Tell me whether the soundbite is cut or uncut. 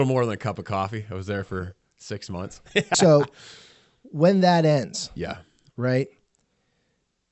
cut